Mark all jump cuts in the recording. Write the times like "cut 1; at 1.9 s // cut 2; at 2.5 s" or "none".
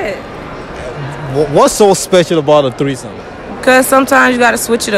none